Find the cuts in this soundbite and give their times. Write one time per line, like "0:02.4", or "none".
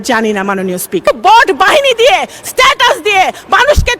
0:01.1

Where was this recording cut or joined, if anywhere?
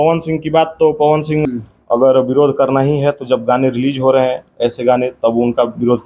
0:01.4

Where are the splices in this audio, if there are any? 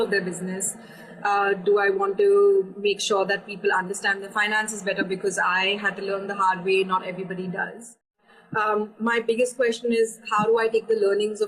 0:08.1

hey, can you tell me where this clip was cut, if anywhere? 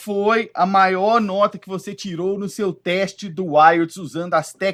none

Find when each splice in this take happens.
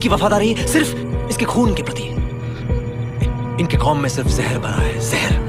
none

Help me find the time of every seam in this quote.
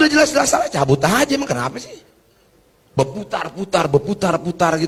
none

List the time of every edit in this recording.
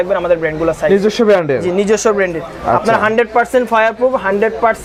none

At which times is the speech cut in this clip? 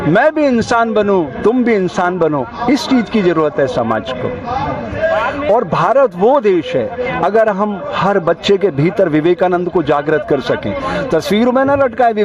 none

